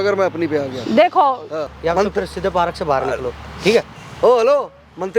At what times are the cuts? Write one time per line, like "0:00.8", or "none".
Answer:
0:01.7